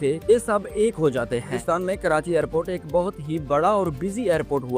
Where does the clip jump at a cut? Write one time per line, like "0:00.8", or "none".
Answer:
0:01.6

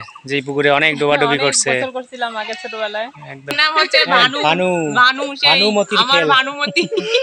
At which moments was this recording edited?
0:03.5

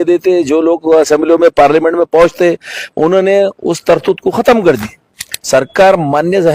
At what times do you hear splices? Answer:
0:05.3

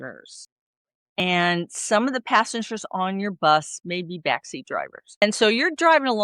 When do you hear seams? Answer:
0:01.2
0:05.2

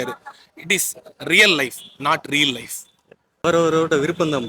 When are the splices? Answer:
0:03.4

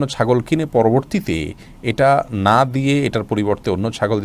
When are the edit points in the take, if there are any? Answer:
none

